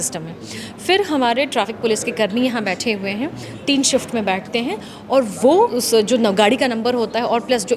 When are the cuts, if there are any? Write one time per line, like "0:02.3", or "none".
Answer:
0:05.8